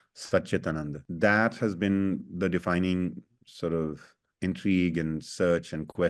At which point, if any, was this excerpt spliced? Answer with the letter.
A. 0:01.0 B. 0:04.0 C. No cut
A